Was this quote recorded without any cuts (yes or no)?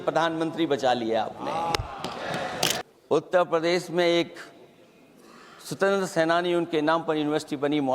no